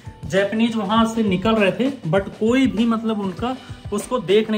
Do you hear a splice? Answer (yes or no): no